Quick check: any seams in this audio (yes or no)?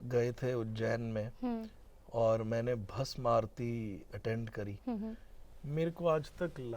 no